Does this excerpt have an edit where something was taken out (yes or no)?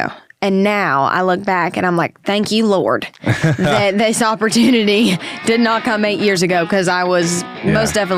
no